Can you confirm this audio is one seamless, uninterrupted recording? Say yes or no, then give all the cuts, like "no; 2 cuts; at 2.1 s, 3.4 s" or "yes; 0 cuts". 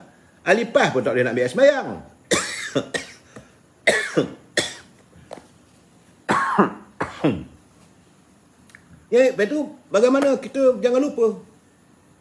yes; 0 cuts